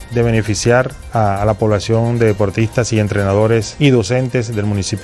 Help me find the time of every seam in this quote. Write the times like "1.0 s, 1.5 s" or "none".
1.0 s, 3.7 s